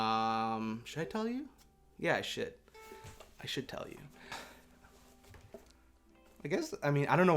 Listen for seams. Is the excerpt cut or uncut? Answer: cut